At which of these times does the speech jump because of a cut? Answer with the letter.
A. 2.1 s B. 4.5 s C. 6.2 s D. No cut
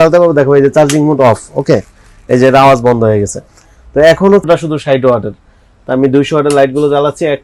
B